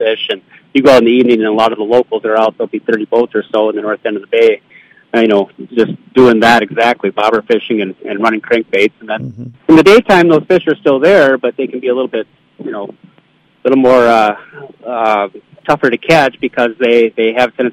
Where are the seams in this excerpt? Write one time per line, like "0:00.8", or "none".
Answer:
none